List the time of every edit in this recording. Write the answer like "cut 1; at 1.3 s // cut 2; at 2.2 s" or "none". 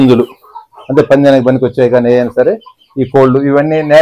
none

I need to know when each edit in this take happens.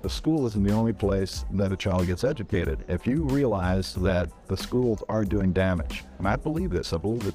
cut 1; at 3.0 s

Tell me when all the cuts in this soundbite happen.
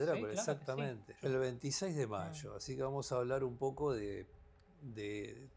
cut 1; at 1.1 s

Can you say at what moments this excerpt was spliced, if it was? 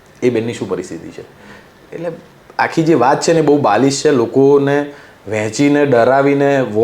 none

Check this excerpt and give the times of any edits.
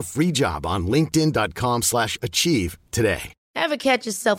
cut 1; at 3.4 s

